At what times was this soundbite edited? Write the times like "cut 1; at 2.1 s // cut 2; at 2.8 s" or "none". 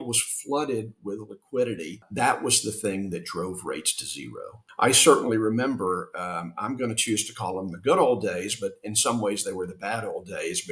cut 1; at 2.0 s // cut 2; at 4.6 s

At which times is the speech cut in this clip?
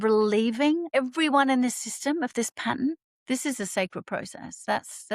cut 1; at 0.9 s // cut 2; at 3.1 s

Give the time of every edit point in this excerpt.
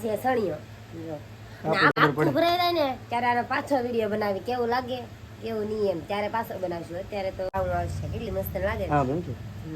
cut 1; at 1.9 s // cut 2; at 7.5 s

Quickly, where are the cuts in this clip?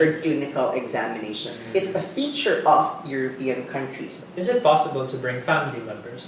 cut 1; at 1.5 s // cut 2; at 4.1 s

